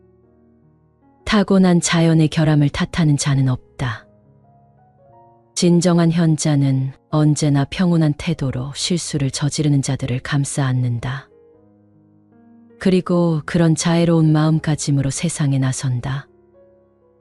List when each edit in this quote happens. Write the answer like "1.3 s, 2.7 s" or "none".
16.2 s